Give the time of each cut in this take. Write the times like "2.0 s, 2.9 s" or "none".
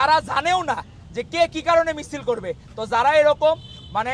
none